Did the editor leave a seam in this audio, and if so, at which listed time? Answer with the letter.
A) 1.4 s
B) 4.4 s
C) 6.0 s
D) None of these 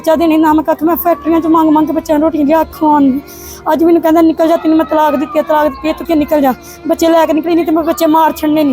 C